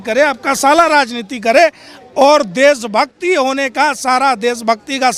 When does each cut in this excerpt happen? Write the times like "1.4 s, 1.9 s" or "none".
none